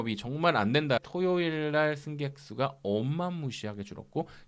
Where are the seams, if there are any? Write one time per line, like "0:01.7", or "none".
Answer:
0:01.0